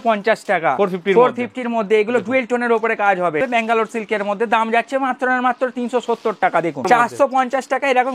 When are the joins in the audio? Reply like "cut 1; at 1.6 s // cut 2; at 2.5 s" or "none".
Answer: cut 1; at 3.4 s // cut 2; at 6.9 s

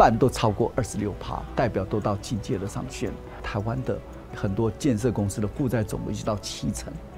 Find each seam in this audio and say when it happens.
cut 1; at 3.5 s

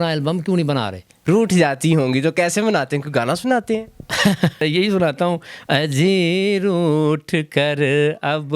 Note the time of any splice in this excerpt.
cut 1; at 1.1 s // cut 2; at 4.6 s

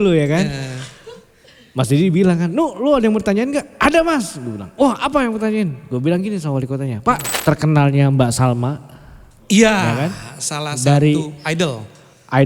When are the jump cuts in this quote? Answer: cut 1; at 7.3 s

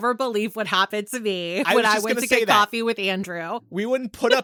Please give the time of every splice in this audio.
none

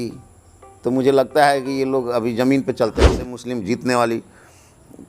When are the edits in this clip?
cut 1; at 3.3 s

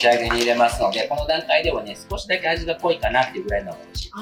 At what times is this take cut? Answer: none

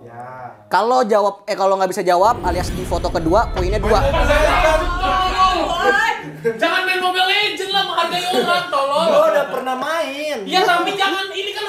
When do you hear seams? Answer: none

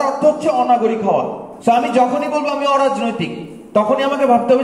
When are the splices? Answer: cut 1; at 1.4 s

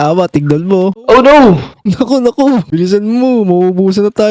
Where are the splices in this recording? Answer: cut 1; at 1.0 s

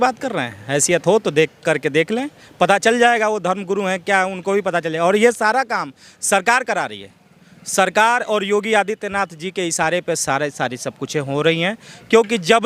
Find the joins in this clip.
none

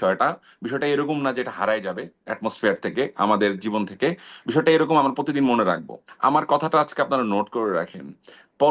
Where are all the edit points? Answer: cut 1; at 6.0 s

